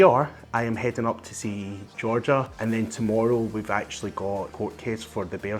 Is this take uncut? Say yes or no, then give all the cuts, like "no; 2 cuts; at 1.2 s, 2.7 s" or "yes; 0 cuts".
no; 2 cuts; at 2.5 s, 4.5 s